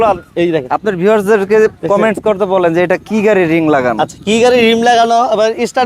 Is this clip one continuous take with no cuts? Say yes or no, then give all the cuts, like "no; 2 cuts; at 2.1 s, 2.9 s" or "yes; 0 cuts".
yes; 0 cuts